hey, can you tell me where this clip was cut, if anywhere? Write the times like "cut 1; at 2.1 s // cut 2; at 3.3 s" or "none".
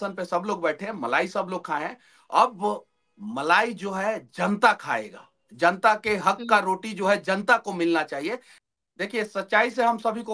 cut 1; at 8.5 s

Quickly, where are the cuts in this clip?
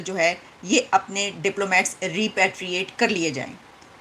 none

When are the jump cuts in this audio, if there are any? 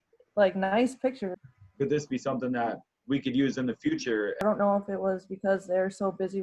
cut 1; at 1.4 s // cut 2; at 4.4 s

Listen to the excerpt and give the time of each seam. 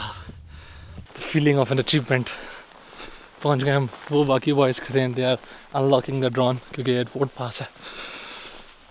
cut 1; at 1.0 s

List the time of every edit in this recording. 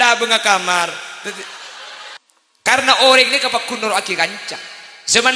cut 1; at 2.2 s

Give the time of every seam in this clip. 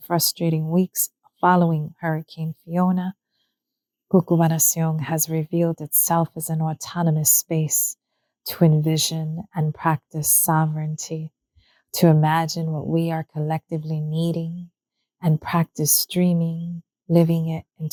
none

